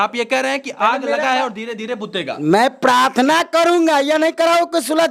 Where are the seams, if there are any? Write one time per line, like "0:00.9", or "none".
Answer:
none